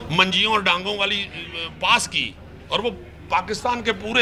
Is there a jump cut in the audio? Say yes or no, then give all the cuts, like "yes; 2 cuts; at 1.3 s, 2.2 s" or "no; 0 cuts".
no; 0 cuts